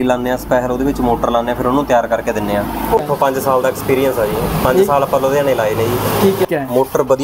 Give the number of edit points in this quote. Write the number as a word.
two